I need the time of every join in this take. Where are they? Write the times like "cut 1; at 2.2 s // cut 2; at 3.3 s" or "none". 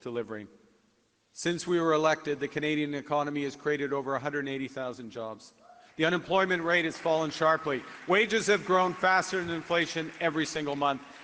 none